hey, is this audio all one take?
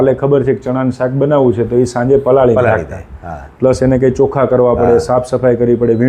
yes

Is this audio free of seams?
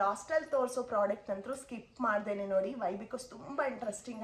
yes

